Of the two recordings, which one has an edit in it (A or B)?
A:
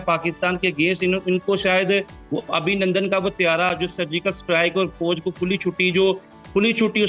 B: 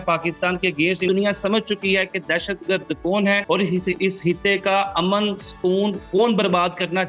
B